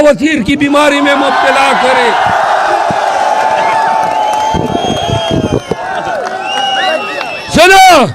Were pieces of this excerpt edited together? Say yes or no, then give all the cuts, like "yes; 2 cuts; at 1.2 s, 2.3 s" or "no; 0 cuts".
no; 0 cuts